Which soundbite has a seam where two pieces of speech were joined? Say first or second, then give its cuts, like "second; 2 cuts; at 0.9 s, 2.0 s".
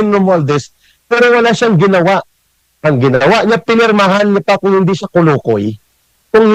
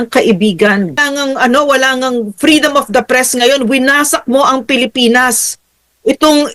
second; 1 cut; at 0.9 s